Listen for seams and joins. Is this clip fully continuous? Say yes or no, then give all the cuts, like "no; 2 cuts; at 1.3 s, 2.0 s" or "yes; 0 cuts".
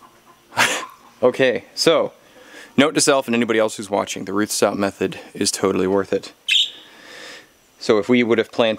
yes; 0 cuts